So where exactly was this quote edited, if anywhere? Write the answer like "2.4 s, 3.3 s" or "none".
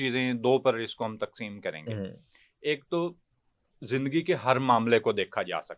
none